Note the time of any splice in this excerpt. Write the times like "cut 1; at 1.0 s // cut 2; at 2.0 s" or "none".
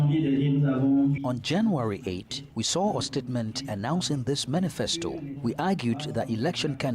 cut 1; at 1.2 s // cut 2; at 5.3 s